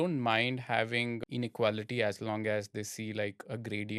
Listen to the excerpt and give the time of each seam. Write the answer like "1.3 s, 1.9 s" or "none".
1.2 s